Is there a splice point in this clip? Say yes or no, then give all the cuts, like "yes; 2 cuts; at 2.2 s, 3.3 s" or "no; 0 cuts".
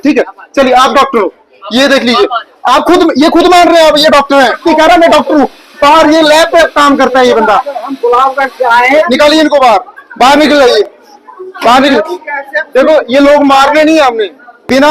yes; 2 cuts; at 4.6 s, 9.1 s